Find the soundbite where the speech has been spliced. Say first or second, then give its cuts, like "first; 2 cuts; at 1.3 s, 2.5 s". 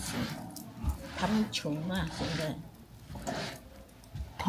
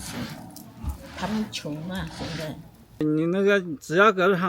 second; 1 cut; at 3.0 s